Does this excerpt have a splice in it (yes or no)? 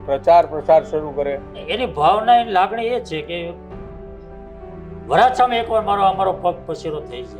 yes